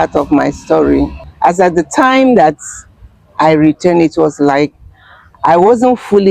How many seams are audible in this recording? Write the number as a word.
one